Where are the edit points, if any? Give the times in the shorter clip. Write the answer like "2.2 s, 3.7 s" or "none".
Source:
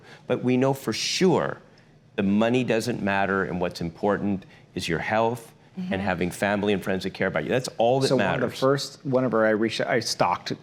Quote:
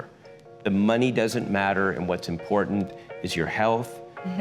none